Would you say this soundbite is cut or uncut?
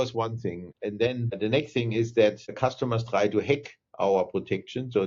cut